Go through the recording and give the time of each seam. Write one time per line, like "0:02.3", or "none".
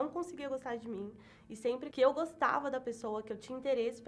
0:01.9